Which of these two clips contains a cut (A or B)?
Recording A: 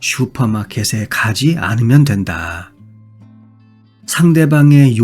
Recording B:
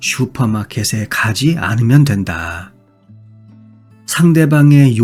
A